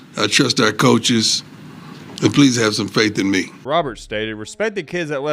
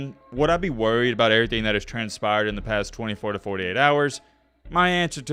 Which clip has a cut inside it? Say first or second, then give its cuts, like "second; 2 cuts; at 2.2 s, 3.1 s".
first; 1 cut; at 3.6 s